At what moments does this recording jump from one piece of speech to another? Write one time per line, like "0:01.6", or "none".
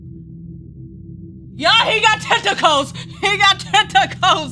none